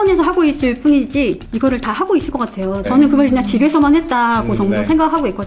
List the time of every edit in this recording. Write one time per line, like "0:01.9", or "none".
none

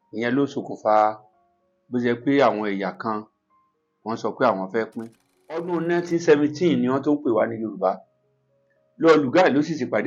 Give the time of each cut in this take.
0:05.7

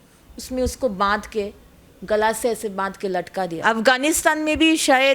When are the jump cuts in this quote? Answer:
0:03.6

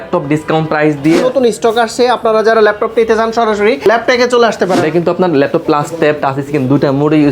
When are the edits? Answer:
0:01.2
0:03.8
0:04.8

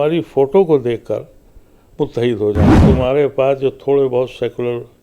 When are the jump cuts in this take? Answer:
0:02.8

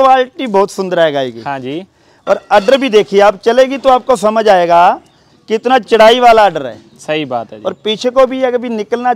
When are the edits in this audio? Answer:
none

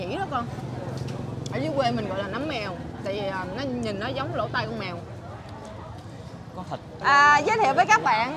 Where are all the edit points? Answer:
0:07.0

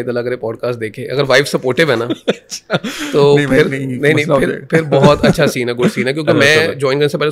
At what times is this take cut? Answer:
none

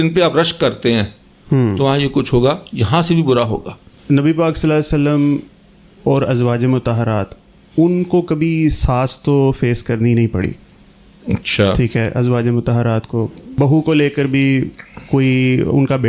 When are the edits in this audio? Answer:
0:03.9
0:13.5

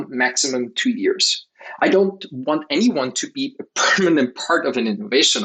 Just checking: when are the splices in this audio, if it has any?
none

